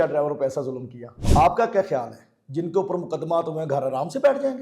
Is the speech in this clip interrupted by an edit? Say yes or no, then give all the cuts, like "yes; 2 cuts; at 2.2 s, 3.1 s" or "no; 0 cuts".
yes; 1 cut; at 1.3 s